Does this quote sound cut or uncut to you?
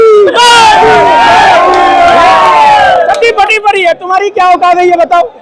uncut